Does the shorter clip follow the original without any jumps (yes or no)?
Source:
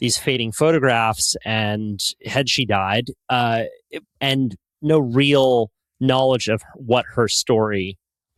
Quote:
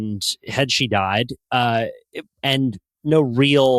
yes